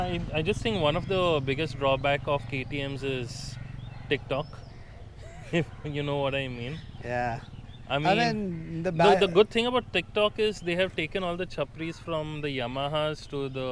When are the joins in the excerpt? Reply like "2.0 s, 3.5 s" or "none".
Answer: none